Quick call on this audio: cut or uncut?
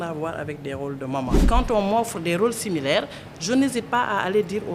cut